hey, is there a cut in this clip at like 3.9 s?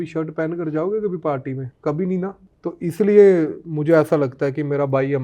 no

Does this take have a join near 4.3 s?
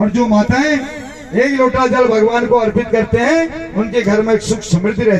no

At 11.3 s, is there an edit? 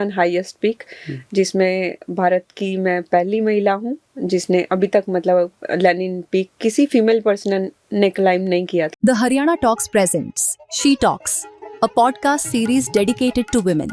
no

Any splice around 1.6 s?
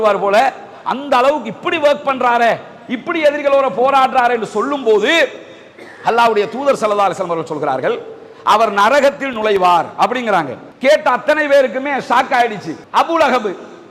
no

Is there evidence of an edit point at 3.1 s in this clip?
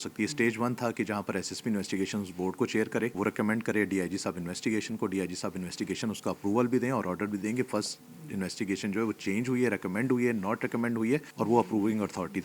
yes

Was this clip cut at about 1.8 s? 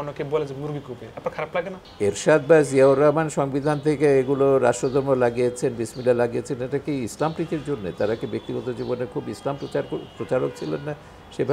yes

